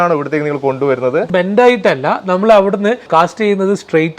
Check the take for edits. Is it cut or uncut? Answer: cut